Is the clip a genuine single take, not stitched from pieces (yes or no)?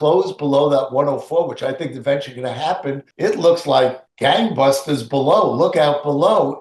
no